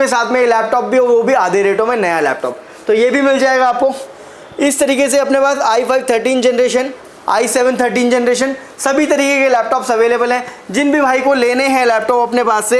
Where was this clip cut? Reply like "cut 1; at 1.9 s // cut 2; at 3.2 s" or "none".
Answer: none